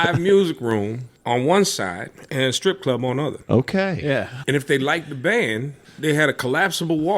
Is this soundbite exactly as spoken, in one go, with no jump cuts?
no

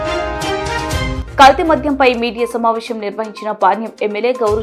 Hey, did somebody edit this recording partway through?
no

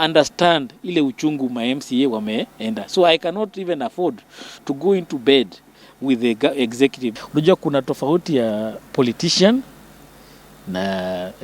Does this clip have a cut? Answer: yes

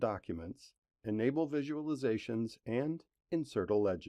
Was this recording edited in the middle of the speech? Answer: yes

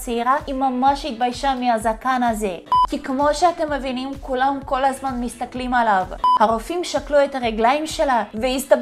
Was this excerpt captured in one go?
no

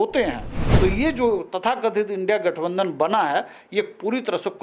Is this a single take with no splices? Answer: yes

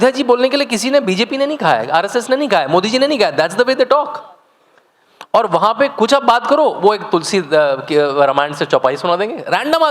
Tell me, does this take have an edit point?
no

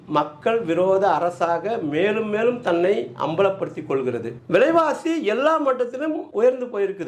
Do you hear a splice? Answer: yes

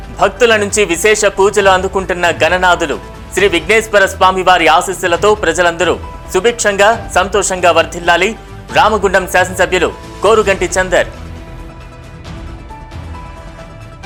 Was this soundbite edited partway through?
no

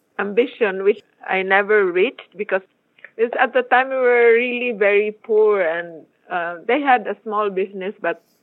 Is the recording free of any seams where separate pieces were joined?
no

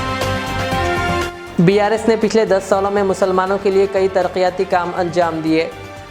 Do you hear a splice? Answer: yes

